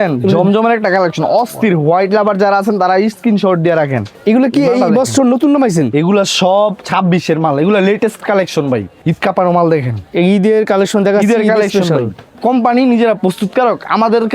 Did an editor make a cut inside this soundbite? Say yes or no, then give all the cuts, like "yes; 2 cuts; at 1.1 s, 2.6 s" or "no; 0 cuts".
yes; 3 cuts; at 4.1 s, 8.9 s, 12.3 s